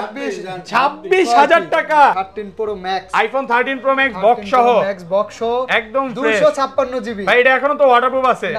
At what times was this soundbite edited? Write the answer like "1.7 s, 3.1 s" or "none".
2.3 s